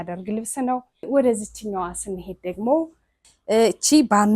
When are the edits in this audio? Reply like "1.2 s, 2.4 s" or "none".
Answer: 1.1 s, 3.1 s